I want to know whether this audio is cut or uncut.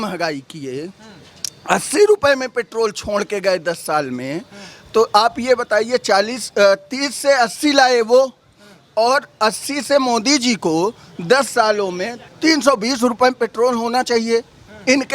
cut